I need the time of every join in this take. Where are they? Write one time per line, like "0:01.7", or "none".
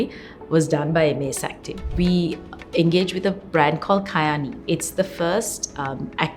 0:01.9